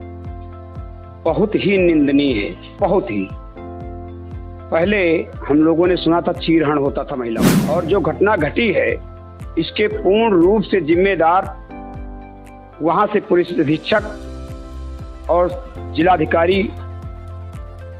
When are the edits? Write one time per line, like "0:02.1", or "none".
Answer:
0:07.2